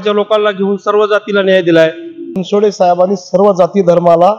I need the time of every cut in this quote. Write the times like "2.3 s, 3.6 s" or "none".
2.4 s